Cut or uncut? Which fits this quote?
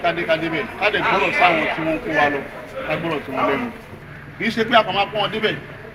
cut